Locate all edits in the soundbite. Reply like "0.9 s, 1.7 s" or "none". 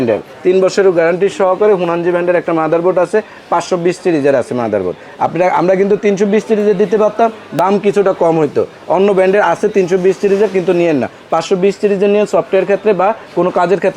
none